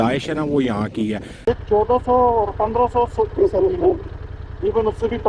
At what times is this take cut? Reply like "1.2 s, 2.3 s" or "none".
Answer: 1.3 s